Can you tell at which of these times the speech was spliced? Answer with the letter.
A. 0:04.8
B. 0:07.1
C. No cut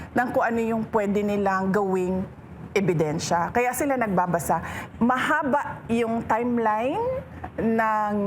A